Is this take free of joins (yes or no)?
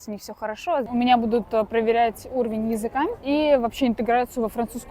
no